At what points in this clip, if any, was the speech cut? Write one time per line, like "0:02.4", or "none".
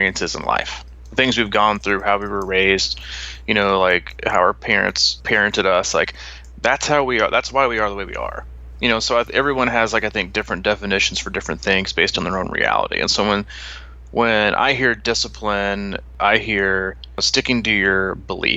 0:05.1
0:16.1
0:17.3